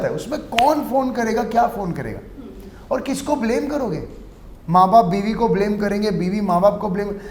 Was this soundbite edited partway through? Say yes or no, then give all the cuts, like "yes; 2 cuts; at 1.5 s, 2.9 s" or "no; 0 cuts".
no; 0 cuts